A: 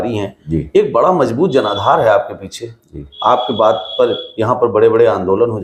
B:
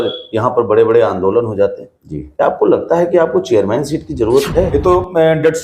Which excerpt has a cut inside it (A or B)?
B